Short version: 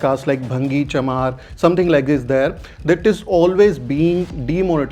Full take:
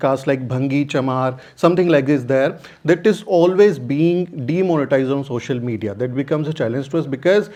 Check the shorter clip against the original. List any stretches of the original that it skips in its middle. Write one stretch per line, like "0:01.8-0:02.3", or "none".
none